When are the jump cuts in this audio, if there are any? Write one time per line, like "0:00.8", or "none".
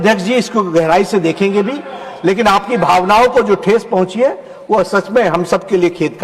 none